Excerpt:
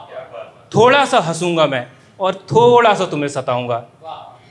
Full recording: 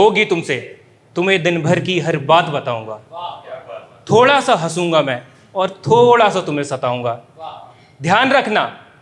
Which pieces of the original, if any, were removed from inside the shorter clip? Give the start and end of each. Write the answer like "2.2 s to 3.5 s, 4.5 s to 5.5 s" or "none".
none